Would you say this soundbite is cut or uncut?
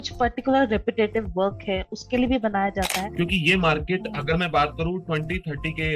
cut